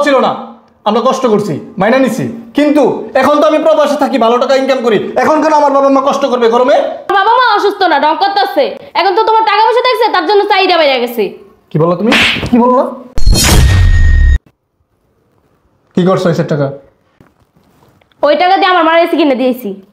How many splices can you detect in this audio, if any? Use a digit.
2